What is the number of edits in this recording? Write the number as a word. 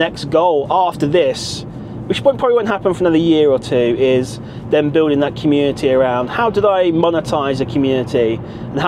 zero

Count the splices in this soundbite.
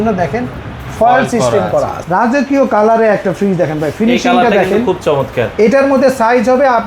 one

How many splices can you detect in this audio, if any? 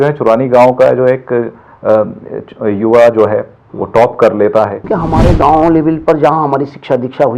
one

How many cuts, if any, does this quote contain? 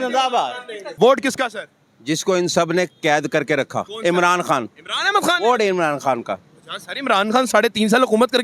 two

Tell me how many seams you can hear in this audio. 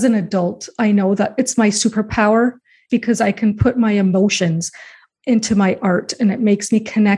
two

